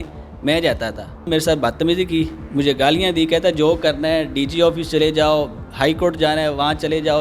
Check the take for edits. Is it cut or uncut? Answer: cut